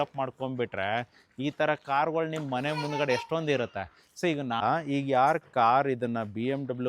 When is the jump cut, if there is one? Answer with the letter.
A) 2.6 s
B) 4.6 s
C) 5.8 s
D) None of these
B